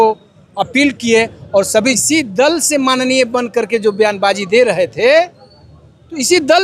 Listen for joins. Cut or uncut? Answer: cut